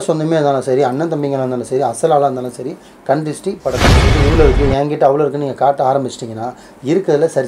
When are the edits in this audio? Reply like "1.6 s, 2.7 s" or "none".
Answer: 4.0 s